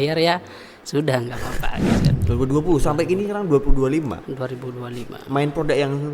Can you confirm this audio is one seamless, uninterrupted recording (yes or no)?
no